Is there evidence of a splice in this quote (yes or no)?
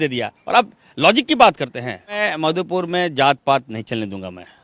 yes